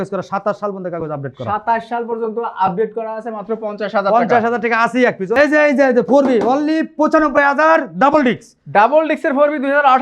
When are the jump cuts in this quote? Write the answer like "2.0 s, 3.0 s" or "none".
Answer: 5.4 s